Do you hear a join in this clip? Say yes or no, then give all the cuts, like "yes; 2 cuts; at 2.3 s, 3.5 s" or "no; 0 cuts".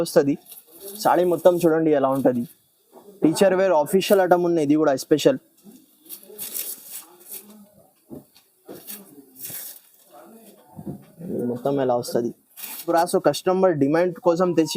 yes; 1 cut; at 12.9 s